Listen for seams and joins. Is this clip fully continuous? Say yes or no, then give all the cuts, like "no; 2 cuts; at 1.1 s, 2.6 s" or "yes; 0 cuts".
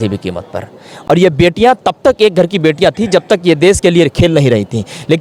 yes; 0 cuts